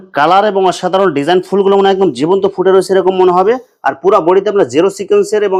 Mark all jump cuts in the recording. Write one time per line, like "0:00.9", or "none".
none